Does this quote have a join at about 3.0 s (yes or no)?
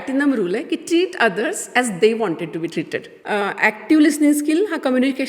yes